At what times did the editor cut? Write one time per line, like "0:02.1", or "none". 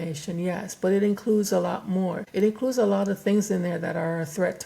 0:02.2